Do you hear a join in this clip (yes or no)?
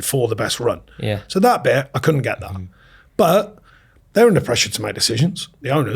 no